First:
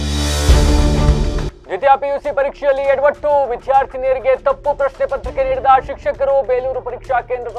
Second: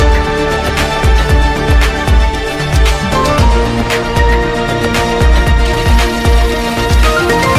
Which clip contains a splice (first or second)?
first